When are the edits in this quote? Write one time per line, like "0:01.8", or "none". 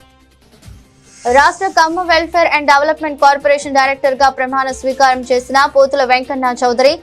0:01.0